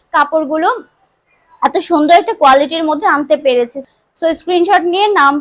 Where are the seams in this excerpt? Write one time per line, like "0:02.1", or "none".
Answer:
0:03.9